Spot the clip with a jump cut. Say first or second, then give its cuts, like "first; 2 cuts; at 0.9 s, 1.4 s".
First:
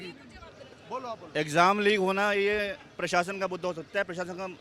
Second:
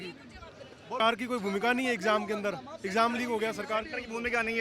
second; 1 cut; at 1.0 s